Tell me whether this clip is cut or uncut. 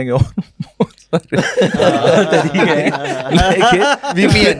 uncut